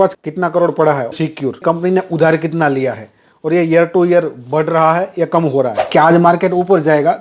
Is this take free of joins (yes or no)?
no